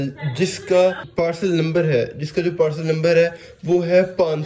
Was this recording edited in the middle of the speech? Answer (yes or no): yes